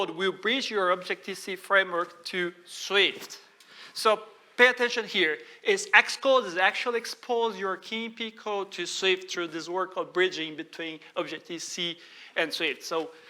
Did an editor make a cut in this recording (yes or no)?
no